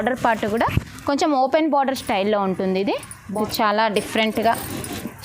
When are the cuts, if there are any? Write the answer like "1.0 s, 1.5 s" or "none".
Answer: 3.1 s